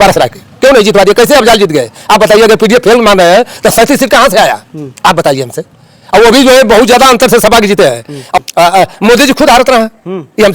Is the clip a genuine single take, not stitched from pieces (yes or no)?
no